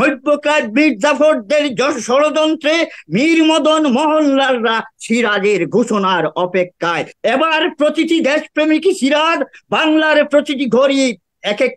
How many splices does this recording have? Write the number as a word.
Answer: one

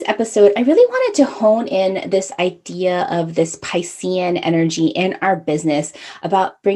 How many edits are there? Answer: zero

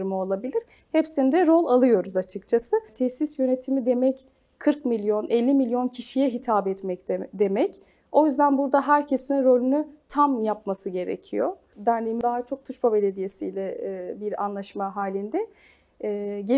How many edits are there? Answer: two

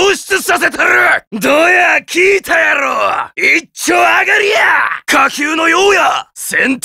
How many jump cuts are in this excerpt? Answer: two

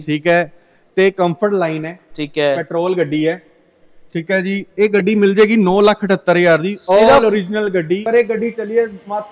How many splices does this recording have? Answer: one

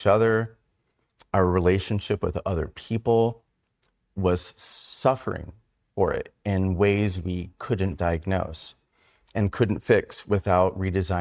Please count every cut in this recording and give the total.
zero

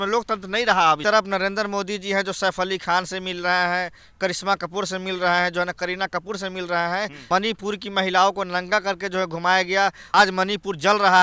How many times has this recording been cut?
three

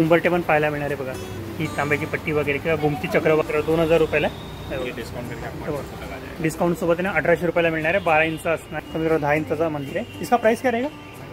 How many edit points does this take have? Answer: two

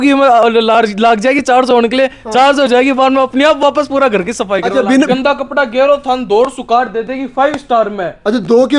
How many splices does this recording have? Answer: one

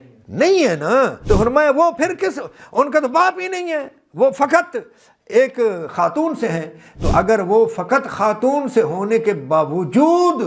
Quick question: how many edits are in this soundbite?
one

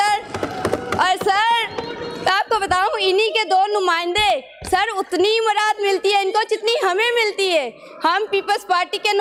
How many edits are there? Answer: zero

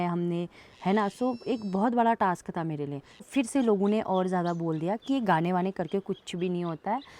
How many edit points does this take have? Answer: one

